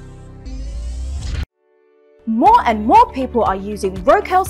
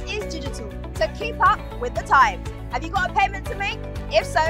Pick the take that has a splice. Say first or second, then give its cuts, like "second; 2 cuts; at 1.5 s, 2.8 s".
first; 1 cut; at 1.2 s